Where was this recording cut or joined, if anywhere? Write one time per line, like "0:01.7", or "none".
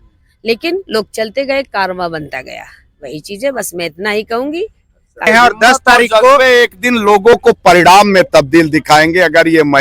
0:05.2